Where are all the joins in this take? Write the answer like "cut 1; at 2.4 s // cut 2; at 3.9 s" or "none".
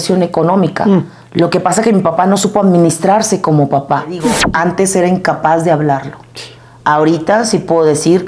cut 1; at 4.4 s